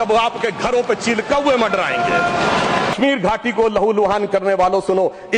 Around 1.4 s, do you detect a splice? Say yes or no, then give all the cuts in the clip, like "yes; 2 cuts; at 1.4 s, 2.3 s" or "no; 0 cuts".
no; 1 cut; at 2.9 s